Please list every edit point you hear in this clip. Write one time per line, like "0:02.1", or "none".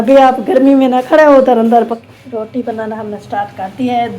0:02.0